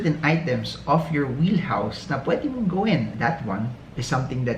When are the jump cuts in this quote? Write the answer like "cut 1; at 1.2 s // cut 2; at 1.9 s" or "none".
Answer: cut 1; at 3.1 s